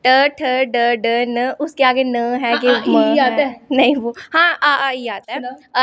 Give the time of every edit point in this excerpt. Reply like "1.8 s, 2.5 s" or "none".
none